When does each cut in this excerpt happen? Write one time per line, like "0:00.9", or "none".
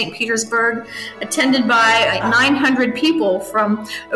0:02.2